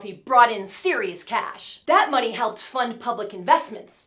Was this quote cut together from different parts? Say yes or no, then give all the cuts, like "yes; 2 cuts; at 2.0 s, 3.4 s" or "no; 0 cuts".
no; 0 cuts